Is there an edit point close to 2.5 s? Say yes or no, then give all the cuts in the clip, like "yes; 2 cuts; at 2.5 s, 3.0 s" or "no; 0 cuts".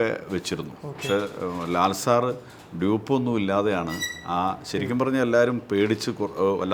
no; 0 cuts